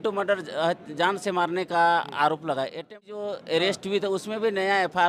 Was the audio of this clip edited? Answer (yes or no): yes